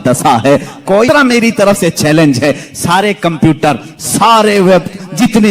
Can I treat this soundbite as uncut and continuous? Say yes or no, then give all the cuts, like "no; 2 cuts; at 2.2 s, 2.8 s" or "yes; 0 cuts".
no; 1 cut; at 1.1 s